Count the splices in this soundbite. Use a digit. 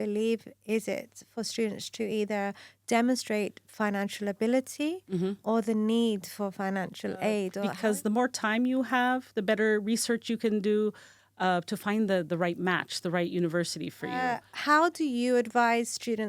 2